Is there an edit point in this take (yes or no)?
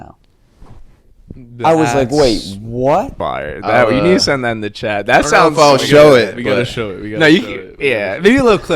yes